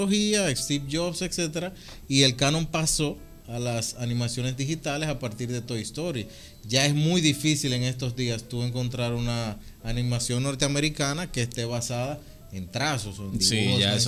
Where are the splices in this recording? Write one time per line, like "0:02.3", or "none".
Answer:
none